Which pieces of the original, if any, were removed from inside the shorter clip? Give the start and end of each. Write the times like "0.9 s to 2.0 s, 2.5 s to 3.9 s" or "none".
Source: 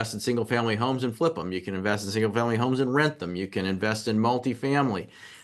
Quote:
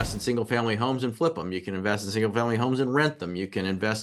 none

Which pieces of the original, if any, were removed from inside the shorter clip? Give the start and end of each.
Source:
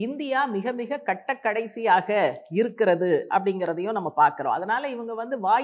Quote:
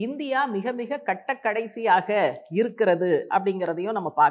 none

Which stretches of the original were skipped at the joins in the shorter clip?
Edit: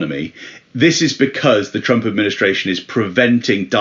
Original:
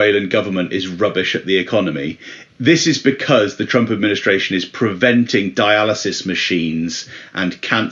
none

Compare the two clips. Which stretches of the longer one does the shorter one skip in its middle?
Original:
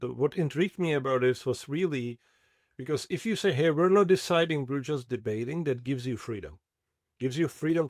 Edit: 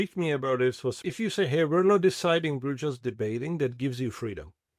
1.6 s to 3.1 s

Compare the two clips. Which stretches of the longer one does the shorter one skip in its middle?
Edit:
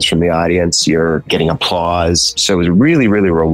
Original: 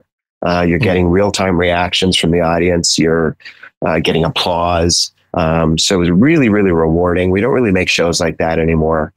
3.4 s to 4.0 s, 5.1 s to 5.8 s

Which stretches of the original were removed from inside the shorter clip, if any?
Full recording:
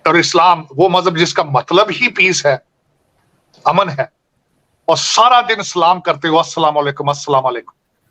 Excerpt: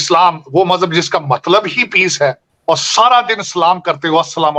2.7 s to 4.7 s

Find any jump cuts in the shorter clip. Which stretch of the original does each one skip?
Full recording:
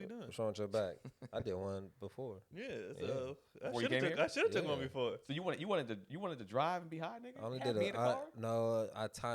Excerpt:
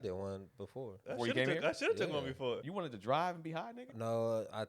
2.4 s to 3.5 s, 5.2 s to 6.1 s, 7.3 s to 8.3 s

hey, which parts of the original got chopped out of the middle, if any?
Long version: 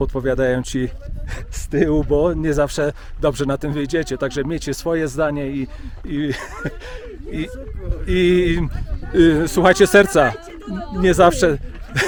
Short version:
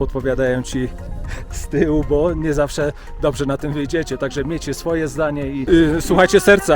5.6 s to 9.1 s

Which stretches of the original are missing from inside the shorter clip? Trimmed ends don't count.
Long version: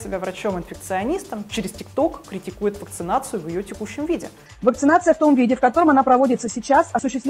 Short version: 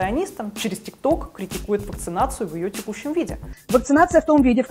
none

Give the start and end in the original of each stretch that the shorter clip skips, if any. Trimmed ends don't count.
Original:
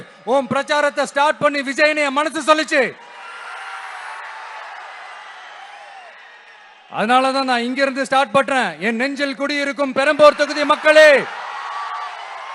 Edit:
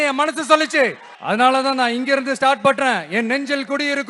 3.1 s to 6.8 s

